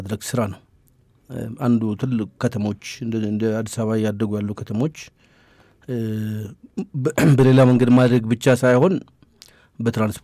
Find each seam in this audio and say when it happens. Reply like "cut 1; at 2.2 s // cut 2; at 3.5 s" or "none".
none